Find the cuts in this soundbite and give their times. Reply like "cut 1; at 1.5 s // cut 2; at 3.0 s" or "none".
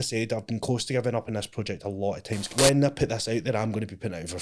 cut 1; at 2.5 s